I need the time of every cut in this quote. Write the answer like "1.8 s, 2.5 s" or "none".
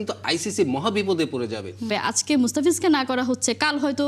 1.9 s